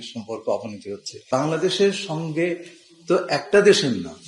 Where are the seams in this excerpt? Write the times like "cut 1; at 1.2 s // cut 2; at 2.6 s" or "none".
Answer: cut 1; at 1.1 s